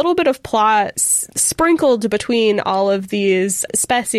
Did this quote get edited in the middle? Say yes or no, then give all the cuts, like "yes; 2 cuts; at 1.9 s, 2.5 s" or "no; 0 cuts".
yes; 1 cut; at 1.0 s